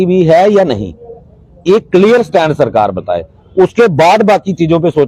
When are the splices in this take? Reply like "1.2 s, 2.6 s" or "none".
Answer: 4.1 s